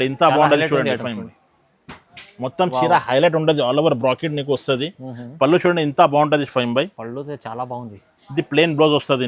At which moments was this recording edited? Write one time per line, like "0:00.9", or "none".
none